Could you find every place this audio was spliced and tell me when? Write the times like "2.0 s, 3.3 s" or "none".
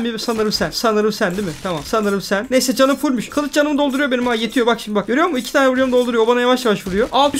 none